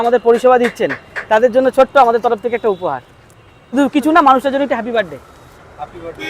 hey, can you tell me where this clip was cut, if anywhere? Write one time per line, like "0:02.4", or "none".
0:03.7